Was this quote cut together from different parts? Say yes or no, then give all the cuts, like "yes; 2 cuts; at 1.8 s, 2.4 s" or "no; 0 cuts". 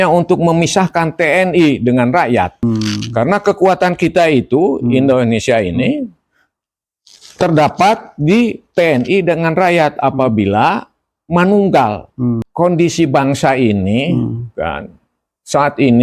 yes; 2 cuts; at 2.6 s, 12.5 s